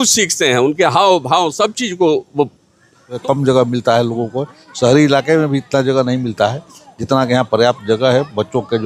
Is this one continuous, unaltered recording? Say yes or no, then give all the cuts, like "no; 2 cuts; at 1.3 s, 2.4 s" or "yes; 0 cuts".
no; 1 cut; at 3.2 s